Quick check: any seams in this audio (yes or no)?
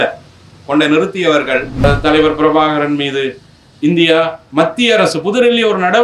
yes